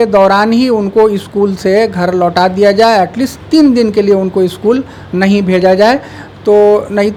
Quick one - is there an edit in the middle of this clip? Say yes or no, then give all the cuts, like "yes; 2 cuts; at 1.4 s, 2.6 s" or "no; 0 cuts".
no; 0 cuts